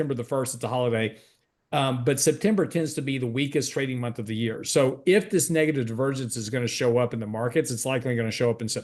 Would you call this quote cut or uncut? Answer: uncut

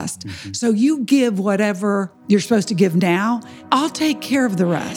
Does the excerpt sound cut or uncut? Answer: cut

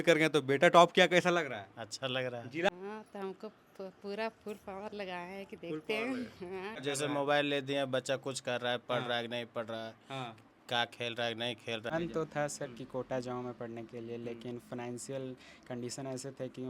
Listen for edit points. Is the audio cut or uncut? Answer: cut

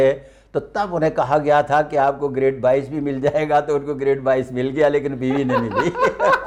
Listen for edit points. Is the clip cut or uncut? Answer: uncut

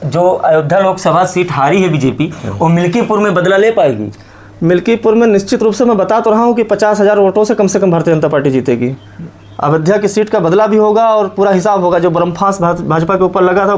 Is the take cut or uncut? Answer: uncut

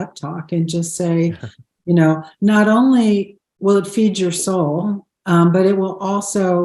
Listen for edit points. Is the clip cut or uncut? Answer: uncut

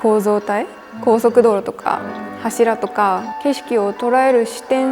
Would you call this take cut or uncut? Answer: cut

